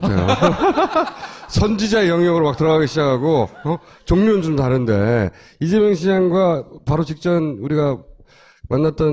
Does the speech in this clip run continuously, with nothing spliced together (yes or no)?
no